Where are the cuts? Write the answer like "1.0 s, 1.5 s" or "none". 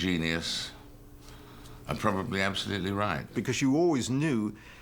3.3 s